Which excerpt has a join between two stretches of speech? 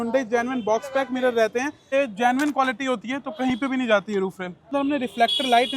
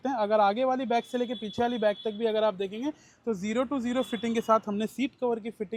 first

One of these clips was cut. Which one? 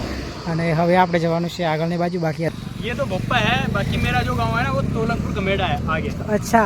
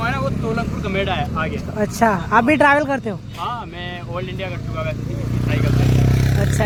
first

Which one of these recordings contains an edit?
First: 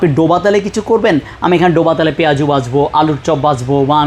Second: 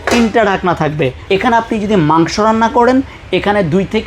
second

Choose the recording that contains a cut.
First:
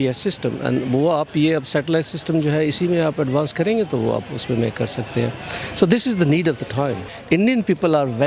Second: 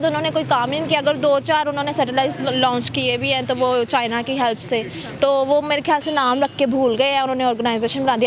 first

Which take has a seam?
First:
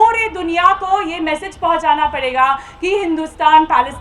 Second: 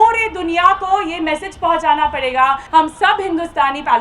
second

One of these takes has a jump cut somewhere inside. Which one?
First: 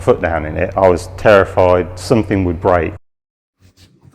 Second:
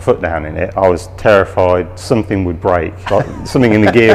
first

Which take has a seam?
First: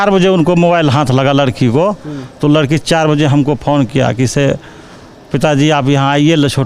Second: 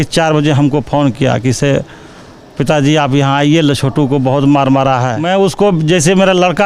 second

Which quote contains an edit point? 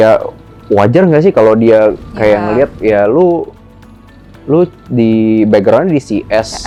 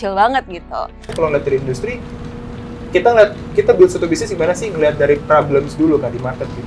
second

